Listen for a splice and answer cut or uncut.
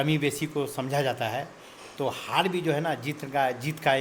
uncut